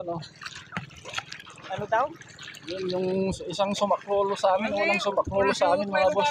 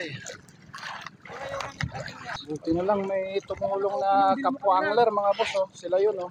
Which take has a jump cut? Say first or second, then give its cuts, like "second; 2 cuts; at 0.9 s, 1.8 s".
second; 1 cut; at 2.4 s